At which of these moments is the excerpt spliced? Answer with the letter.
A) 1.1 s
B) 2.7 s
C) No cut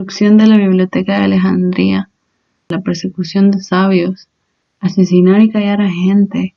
B